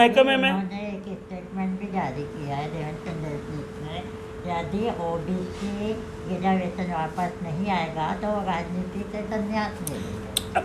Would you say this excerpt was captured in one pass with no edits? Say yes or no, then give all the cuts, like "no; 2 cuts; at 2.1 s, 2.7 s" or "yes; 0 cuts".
yes; 0 cuts